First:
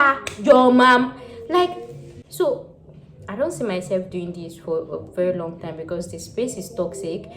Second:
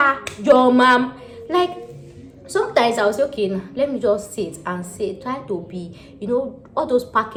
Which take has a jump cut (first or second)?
first